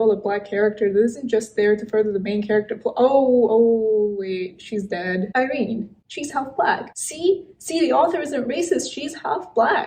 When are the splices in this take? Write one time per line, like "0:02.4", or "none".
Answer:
none